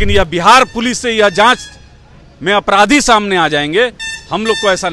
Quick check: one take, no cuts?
yes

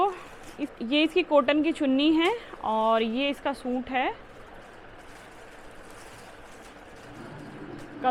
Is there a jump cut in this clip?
no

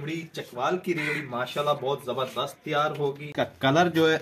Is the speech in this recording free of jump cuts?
no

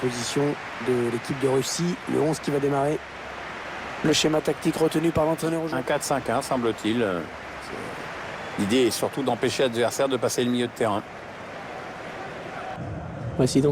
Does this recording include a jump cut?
yes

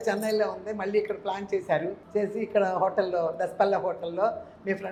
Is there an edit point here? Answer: no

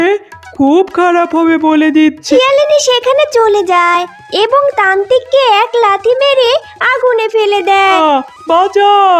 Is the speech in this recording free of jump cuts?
no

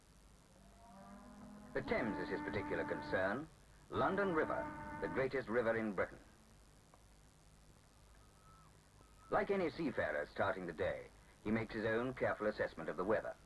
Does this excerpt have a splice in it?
yes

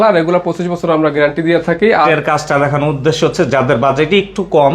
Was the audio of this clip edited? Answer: yes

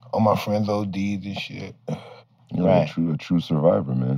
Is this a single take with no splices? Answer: yes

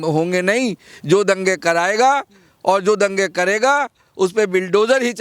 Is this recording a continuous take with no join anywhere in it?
yes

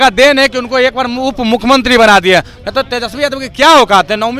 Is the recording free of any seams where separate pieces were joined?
yes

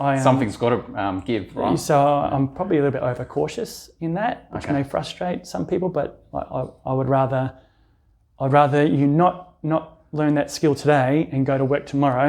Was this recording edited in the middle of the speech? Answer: no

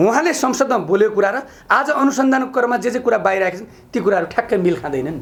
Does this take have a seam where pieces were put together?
no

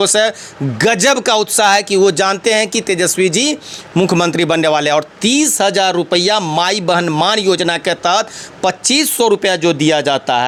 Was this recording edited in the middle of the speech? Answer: no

